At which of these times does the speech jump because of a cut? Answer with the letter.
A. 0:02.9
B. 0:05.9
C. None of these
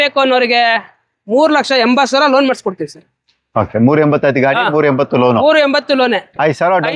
C